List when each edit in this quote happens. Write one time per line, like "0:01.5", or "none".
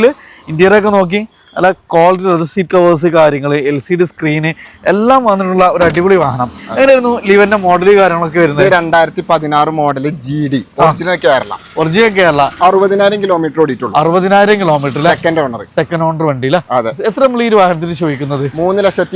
0:12.6